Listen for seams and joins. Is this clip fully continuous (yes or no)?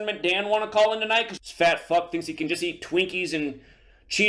no